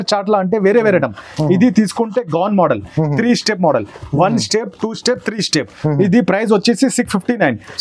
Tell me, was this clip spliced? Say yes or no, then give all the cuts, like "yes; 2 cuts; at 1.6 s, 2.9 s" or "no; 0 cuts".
no; 0 cuts